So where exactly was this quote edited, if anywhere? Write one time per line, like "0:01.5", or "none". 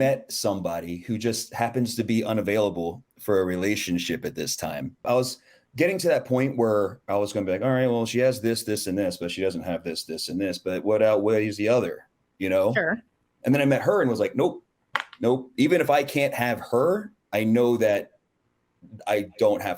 0:05.0